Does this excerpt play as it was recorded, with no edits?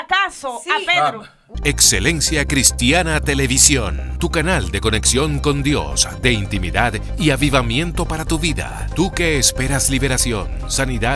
no; 1 cut; at 1.4 s

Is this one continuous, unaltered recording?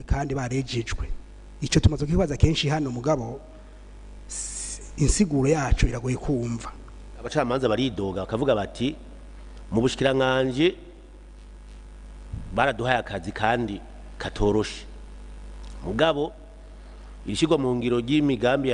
no; 1 cut; at 7.3 s

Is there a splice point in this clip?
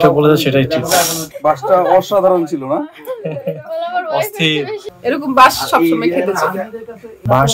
yes; 2 cuts; at 1.3 s, 4.8 s

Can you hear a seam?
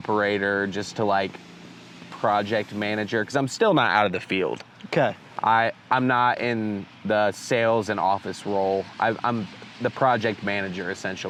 no; 0 cuts

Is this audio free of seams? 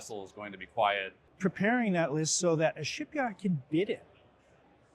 no; 1 cut; at 1.2 s

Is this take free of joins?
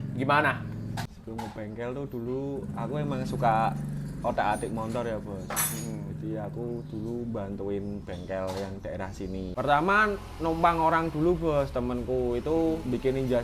no; 2 cuts; at 1.1 s, 9.5 s

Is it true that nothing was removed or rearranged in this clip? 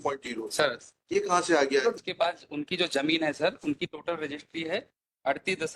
no; 1 cut; at 2.0 s

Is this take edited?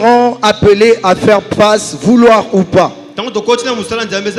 no; 0 cuts

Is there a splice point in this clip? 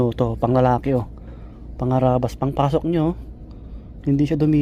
no; 0 cuts

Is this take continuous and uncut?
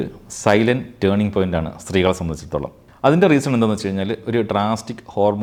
yes; 0 cuts

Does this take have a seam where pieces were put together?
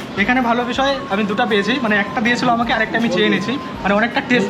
no; 0 cuts

